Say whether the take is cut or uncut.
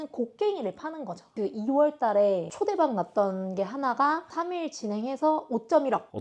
cut